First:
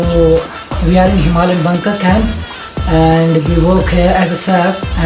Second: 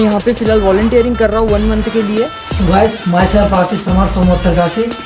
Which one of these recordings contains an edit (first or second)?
second